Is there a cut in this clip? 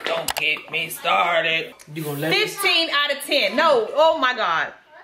yes; 1 cut; at 1.8 s

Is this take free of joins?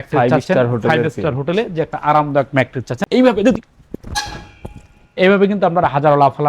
no; 1 cut; at 3.0 s

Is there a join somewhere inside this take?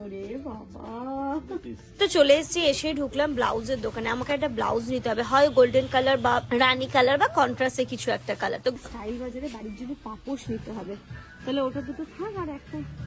yes; 2 cuts; at 2.0 s, 8.7 s

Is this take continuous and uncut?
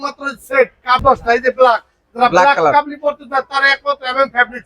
no; 1 cut; at 1.0 s

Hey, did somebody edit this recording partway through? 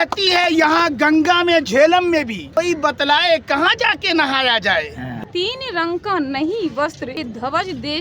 yes; 3 cuts; at 2.4 s, 5.1 s, 7.2 s

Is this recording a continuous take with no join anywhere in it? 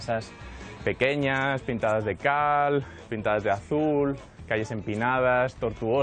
yes; 0 cuts

